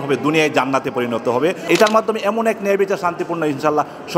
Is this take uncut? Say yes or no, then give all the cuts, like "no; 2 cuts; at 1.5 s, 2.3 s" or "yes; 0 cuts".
no; 1 cut; at 1.7 s